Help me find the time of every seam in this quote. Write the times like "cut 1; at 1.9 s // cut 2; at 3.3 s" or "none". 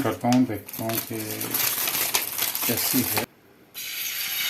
cut 1; at 3.2 s